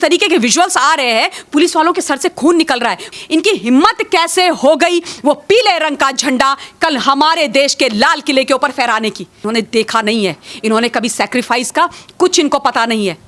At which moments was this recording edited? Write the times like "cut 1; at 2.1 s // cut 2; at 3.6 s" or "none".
cut 1; at 3.1 s // cut 2; at 9.4 s